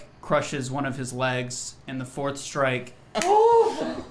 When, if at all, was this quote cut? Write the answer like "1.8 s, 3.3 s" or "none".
3.1 s